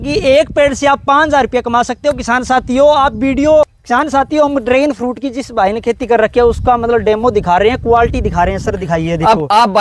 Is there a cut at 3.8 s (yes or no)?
yes